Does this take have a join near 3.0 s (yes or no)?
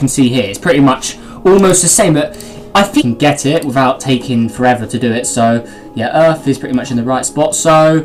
no